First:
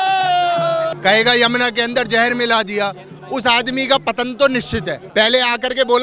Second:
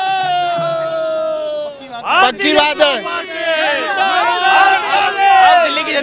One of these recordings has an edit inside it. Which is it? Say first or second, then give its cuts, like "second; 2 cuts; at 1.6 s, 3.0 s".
first; 2 cuts; at 0.9 s, 5.0 s